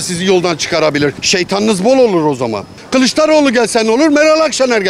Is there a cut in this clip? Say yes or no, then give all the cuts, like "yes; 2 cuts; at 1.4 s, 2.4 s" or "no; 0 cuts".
yes; 2 cuts; at 1.2 s, 2.8 s